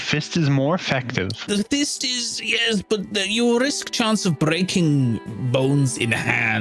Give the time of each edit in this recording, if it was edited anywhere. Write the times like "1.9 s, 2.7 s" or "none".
1.4 s